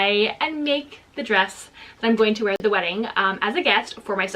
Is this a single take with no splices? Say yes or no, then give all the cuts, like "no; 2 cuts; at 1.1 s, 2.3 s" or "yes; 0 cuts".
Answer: no; 1 cut; at 2.6 s